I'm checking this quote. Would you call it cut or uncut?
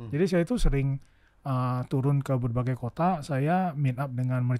uncut